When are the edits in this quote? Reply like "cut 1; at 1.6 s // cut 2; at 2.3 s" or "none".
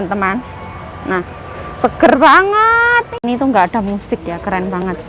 cut 1; at 3.1 s

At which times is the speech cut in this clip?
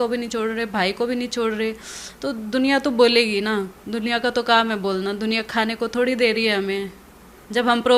none

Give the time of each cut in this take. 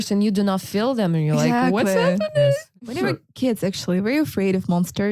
cut 1; at 2.9 s

